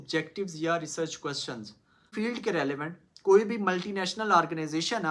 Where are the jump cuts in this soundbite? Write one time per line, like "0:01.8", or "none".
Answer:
0:02.1